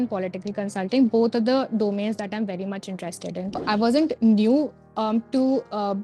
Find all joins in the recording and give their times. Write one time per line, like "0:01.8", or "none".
0:03.6